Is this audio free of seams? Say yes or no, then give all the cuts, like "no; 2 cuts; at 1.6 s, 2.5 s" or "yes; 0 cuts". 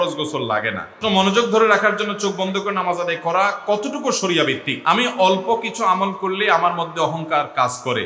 no; 2 cuts; at 1.0 s, 4.7 s